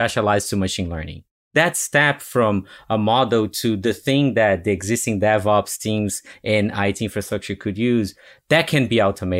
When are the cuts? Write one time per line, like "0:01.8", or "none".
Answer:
0:01.5